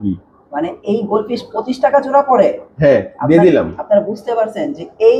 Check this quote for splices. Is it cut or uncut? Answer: uncut